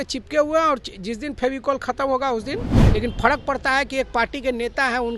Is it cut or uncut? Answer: cut